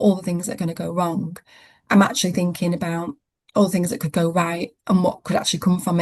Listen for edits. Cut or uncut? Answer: uncut